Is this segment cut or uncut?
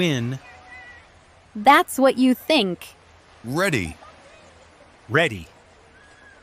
uncut